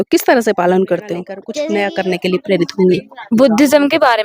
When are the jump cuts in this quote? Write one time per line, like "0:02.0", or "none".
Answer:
0:01.4